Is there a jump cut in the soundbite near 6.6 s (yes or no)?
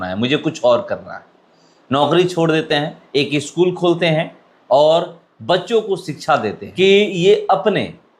yes